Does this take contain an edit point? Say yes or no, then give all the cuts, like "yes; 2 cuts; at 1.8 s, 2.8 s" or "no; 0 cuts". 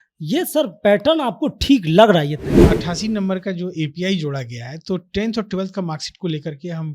yes; 1 cut; at 2.6 s